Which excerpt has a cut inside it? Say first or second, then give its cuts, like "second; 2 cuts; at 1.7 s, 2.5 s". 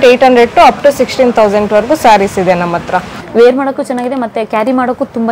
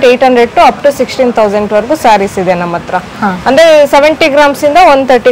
first; 1 cut; at 3.1 s